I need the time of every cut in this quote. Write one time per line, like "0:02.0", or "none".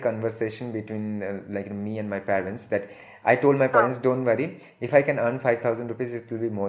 none